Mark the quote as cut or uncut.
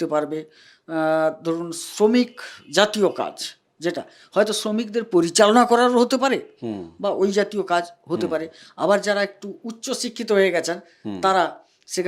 uncut